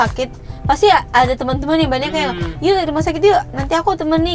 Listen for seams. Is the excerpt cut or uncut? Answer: uncut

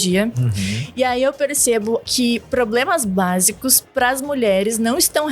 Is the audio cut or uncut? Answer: cut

